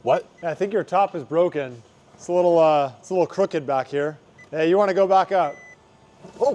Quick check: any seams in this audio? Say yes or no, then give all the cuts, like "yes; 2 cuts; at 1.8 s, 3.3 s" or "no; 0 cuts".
yes; 1 cut; at 4.2 s